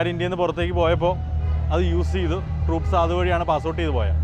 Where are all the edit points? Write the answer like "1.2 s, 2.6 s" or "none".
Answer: none